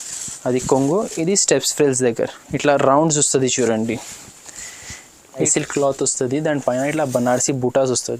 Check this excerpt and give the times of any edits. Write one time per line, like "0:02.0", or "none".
0:05.4